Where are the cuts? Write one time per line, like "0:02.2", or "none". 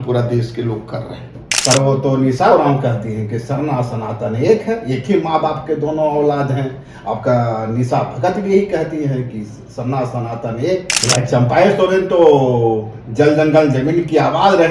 0:01.5
0:11.0